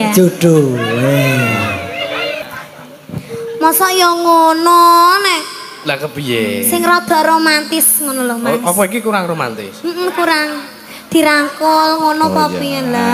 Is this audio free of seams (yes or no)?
no